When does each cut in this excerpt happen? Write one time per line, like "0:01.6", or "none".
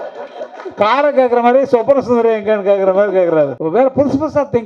0:03.6